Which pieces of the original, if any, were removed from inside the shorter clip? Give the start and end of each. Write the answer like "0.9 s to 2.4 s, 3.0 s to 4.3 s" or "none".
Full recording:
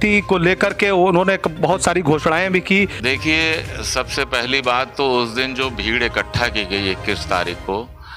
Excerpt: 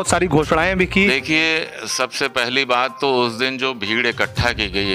2.8 s to 3.1 s